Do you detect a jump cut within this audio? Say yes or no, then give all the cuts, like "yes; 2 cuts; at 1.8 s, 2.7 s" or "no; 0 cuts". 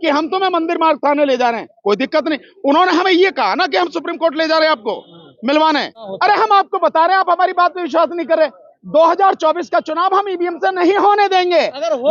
yes; 1 cut; at 6.1 s